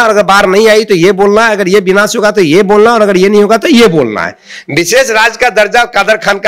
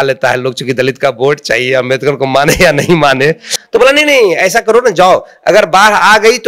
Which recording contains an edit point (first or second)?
second